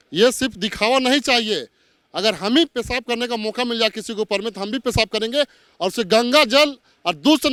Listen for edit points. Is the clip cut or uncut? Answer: uncut